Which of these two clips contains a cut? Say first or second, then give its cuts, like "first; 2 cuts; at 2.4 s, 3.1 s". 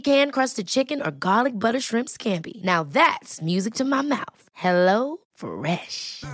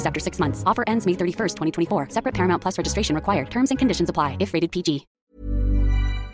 second; 1 cut; at 5.2 s